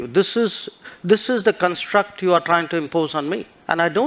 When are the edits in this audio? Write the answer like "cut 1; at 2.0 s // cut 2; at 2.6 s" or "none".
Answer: none